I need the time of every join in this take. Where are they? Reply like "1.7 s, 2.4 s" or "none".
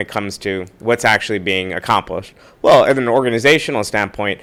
none